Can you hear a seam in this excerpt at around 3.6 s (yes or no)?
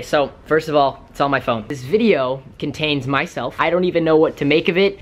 yes